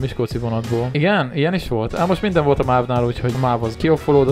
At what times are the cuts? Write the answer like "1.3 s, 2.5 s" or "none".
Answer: 0.9 s, 3.4 s